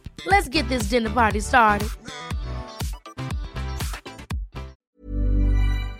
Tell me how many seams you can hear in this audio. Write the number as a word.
one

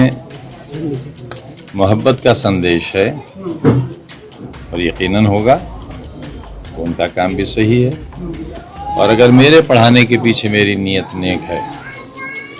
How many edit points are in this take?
zero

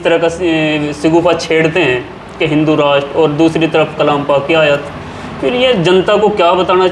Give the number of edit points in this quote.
zero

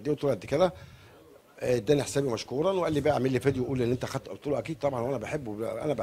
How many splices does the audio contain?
zero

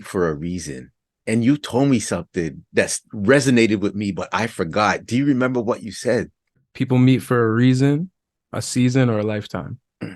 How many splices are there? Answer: one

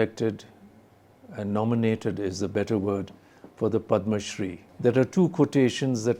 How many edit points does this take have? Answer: one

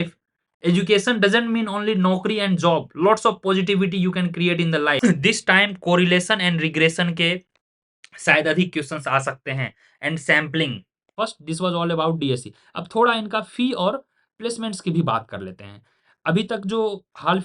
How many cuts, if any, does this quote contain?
two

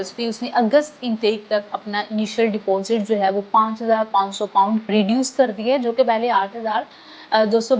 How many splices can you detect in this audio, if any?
zero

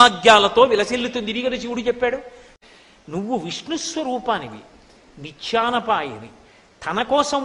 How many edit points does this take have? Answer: one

